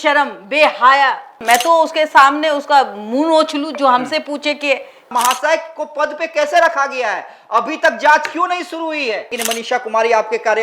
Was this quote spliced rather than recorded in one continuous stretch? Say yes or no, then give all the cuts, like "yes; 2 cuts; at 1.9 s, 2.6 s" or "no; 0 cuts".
yes; 3 cuts; at 1.3 s, 5.1 s, 9.4 s